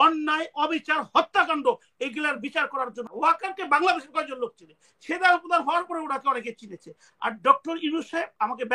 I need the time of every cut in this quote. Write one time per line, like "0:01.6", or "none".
0:03.0